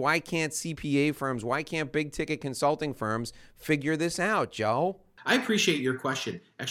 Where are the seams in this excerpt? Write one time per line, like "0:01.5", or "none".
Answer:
0:05.1